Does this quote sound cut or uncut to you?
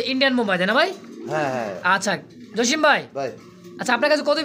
uncut